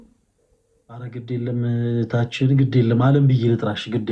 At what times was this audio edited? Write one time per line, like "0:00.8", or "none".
0:01.1